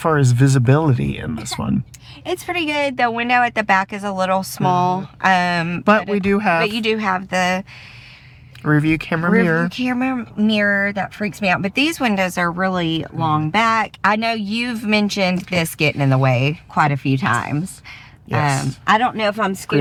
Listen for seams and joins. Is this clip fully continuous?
yes; 0 cuts

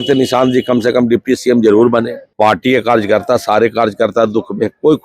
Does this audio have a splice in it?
yes; 1 cut; at 2.2 s

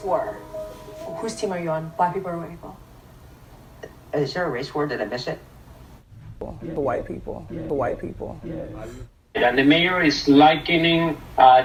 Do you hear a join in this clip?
no; 0 cuts

